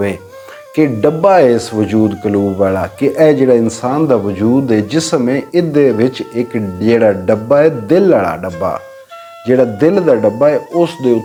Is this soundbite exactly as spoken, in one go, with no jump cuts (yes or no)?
yes